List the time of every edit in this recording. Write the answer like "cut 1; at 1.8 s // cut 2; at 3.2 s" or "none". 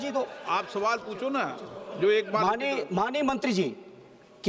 none